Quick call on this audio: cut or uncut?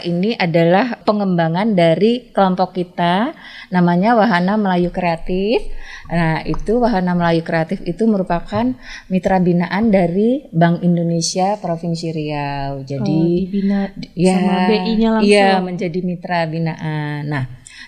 cut